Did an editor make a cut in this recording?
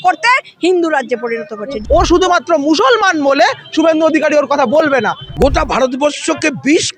yes; 2 cuts; at 1.8 s, 5.2 s

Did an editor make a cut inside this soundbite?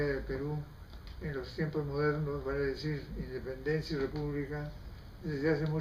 yes; 1 cut; at 1.7 s

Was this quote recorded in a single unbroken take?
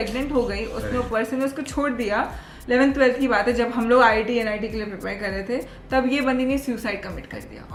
yes; 0 cuts

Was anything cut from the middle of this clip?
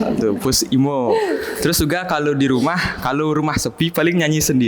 no; 0 cuts

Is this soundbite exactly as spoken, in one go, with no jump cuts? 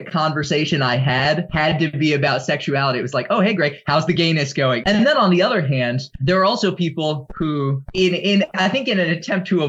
no; 4 cuts; at 1.5 s, 4.8 s, 6.1 s, 7.8 s

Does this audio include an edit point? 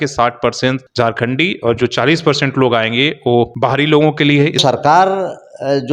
yes; 3 cuts; at 0.8 s, 3.5 s, 4.6 s

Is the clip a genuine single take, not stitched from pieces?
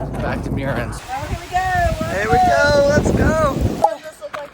no; 2 cuts; at 1.0 s, 3.8 s

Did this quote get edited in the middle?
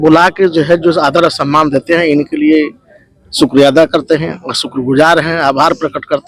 no; 0 cuts

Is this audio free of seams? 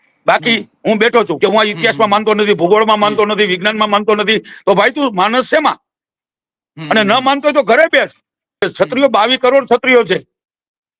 no; 2 cuts; at 1.3 s, 8.7 s

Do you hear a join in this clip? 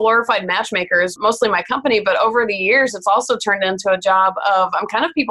yes; 1 cut; at 1.1 s

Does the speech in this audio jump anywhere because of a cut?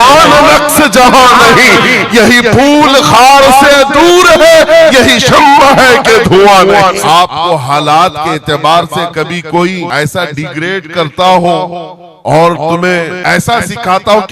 yes; 3 cuts; at 7.0 s, 9.9 s, 13.1 s

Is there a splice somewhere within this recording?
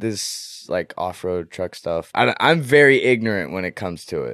yes; 1 cut; at 2.1 s

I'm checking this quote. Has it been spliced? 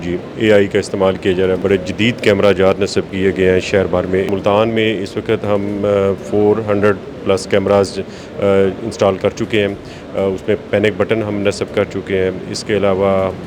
yes; 2 cuts; at 1.6 s, 4.3 s

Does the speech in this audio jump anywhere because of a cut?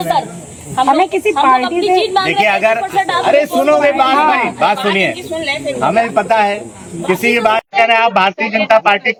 no; 0 cuts

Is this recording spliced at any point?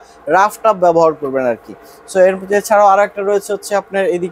no; 0 cuts

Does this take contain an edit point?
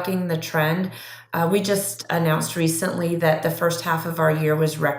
no; 0 cuts

